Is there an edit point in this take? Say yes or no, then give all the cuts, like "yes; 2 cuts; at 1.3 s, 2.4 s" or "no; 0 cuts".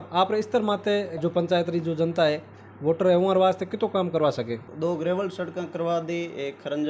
yes; 1 cut; at 4.6 s